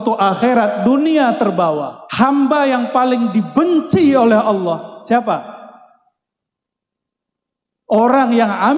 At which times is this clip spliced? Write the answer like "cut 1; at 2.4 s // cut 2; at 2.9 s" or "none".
cut 1; at 2.0 s